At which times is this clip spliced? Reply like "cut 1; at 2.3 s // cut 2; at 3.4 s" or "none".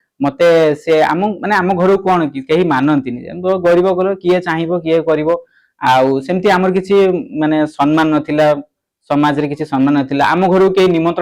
none